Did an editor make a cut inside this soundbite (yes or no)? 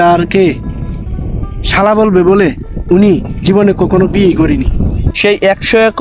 yes